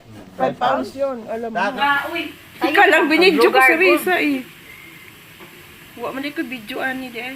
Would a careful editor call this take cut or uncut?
cut